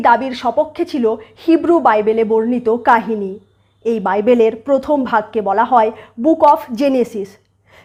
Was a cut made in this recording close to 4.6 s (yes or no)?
no